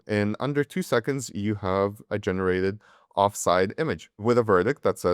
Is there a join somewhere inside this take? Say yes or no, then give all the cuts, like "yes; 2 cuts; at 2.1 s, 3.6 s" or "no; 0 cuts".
yes; 1 cut; at 4.1 s